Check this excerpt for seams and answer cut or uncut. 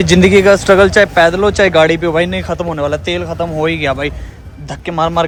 uncut